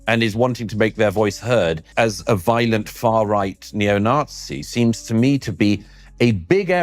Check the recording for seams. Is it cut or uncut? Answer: cut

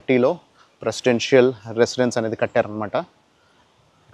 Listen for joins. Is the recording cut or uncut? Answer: uncut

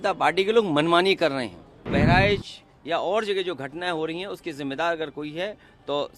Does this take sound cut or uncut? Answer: cut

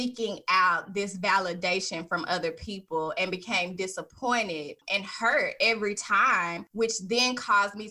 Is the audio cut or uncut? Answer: cut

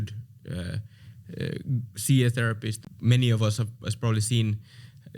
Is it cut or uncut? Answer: cut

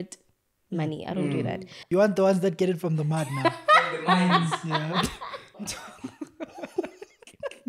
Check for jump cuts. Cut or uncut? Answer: cut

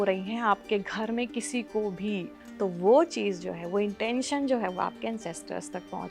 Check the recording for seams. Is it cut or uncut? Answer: cut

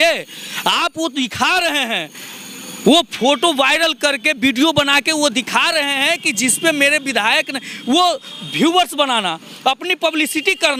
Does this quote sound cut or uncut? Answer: uncut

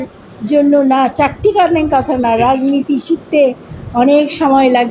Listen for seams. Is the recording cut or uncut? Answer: uncut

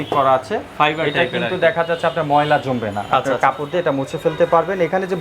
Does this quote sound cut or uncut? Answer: uncut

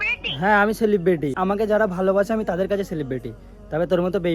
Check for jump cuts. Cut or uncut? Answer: cut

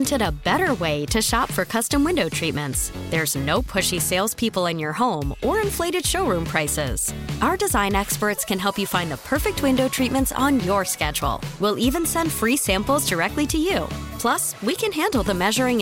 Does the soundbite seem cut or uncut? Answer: uncut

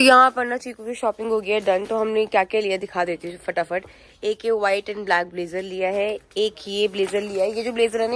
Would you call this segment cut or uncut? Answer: uncut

